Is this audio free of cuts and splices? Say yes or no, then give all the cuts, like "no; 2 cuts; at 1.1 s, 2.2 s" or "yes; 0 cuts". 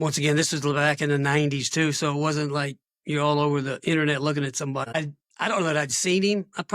no; 1 cut; at 4.8 s